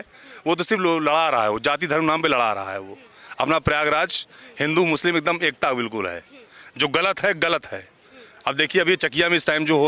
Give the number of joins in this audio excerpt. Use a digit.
0